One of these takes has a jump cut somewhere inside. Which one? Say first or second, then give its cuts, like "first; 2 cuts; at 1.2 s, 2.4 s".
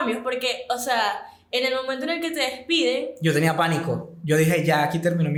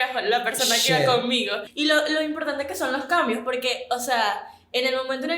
second; 1 cut; at 1.6 s